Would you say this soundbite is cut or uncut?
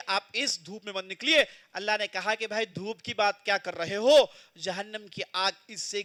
uncut